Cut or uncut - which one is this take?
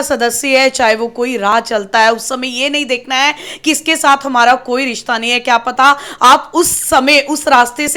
uncut